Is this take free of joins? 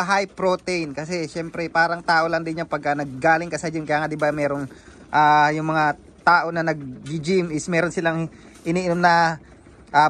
yes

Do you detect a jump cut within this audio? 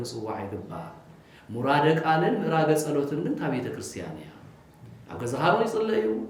no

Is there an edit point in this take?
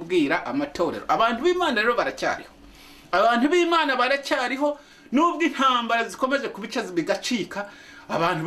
no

